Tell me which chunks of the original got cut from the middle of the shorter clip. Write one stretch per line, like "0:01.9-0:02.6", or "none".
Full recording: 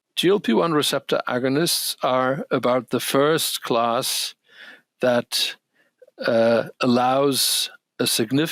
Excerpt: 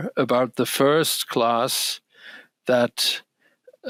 none